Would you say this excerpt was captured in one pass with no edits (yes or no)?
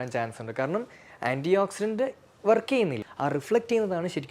no